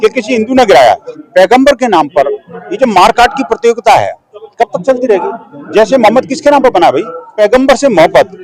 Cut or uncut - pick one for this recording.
cut